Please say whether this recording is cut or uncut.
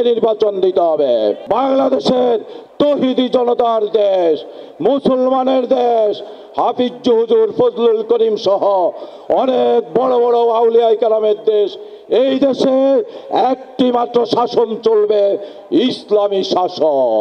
cut